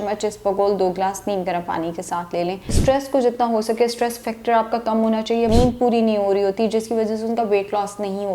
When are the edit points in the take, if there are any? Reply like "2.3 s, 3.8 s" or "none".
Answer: 2.8 s, 5.5 s